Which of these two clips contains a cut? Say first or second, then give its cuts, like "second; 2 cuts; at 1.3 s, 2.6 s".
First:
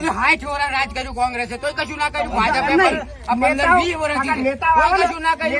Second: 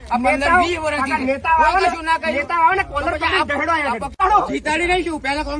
second; 1 cut; at 4.1 s